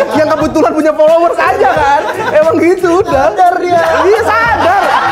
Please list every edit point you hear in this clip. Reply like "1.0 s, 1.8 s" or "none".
none